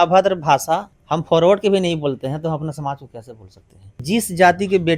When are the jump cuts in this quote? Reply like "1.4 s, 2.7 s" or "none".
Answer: 1.0 s, 4.0 s

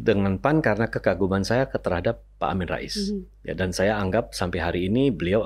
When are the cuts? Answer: none

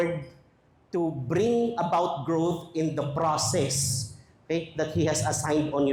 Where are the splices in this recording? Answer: none

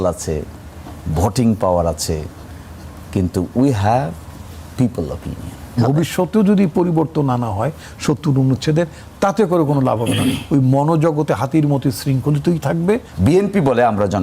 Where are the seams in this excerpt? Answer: 5.8 s, 13.1 s

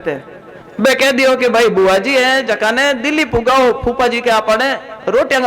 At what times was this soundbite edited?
none

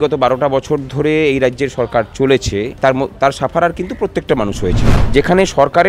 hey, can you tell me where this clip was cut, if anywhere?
2.7 s, 4.9 s

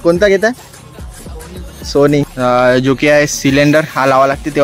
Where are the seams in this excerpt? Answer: 2.3 s

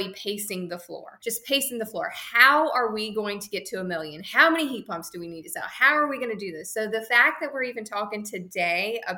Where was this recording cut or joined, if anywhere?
1.0 s

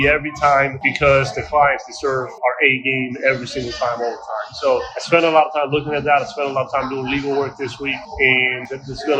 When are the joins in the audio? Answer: none

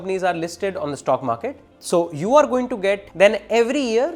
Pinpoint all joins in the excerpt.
1.7 s, 3.1 s

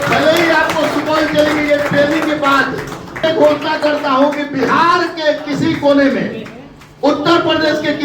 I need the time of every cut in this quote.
3.2 s

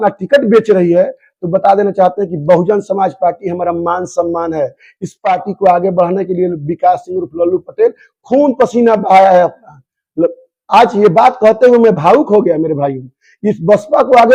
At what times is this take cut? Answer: none

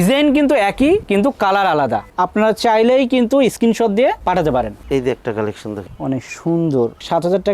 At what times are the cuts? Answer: none

